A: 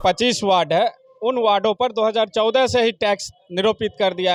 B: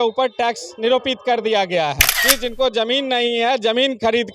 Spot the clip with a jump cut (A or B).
B